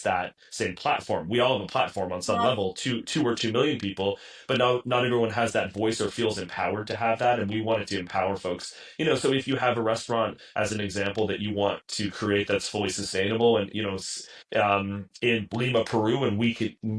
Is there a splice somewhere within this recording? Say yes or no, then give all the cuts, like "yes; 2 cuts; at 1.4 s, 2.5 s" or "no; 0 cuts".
no; 0 cuts